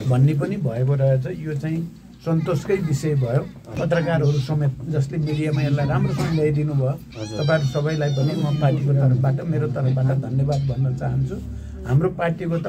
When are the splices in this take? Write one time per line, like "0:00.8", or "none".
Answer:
0:03.8